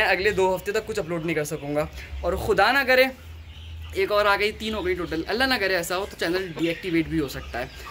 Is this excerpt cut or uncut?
uncut